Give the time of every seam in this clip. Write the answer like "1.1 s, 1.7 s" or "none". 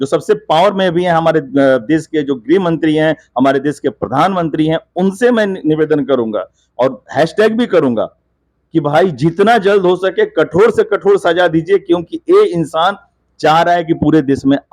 none